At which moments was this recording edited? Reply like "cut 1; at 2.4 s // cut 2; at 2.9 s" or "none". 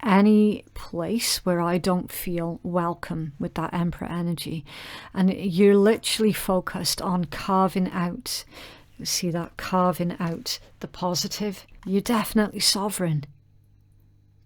cut 1; at 11.7 s